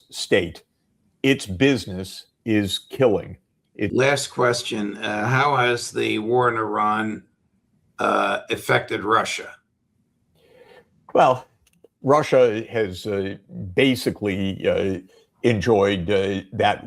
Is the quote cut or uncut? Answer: cut